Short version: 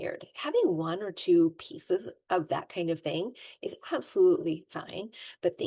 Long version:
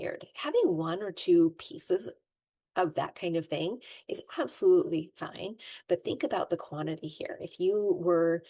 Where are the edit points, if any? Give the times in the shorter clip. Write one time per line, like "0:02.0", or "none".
0:02.1